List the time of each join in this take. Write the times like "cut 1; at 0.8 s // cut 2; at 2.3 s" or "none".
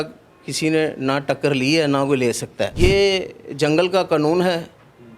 cut 1; at 2.7 s